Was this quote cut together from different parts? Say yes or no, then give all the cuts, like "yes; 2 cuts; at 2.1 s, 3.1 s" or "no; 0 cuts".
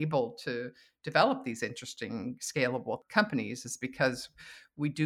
yes; 1 cut; at 3.0 s